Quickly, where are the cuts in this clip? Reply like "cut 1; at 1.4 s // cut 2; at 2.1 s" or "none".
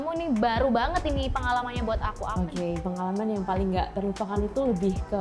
none